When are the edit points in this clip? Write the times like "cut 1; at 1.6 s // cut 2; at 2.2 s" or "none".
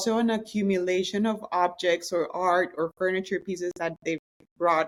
none